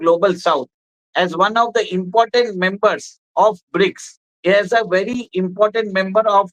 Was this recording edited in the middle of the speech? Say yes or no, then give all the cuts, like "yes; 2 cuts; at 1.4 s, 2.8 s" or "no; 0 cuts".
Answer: no; 0 cuts